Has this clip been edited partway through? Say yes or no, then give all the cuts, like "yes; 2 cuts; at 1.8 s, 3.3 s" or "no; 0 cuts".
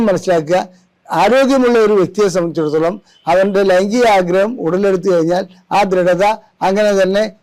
no; 0 cuts